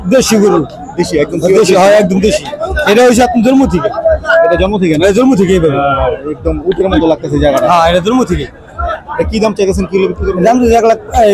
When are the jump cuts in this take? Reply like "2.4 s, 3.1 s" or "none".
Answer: none